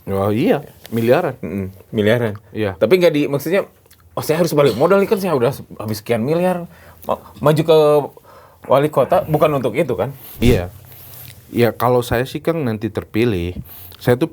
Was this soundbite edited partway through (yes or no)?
yes